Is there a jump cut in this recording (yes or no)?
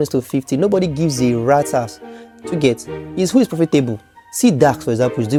no